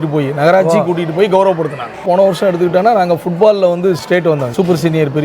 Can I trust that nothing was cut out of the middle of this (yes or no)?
no